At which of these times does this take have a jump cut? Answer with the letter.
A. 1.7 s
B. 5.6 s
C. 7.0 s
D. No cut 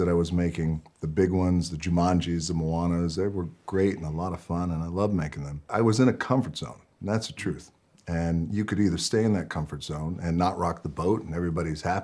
B